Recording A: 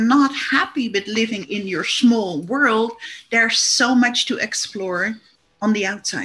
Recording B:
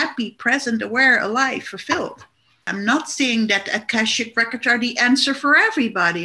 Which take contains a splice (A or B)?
B